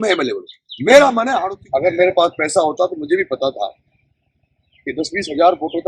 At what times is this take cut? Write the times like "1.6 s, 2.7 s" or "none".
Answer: 1.4 s